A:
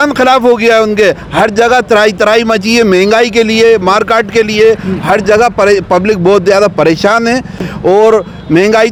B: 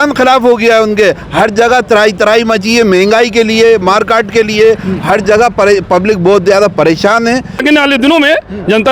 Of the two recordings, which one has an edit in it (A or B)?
B